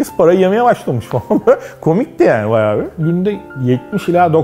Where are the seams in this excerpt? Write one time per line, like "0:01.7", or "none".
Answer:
0:02.9